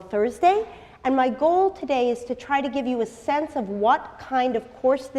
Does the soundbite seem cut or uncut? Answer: uncut